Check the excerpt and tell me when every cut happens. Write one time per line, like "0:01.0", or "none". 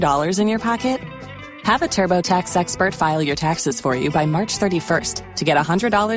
none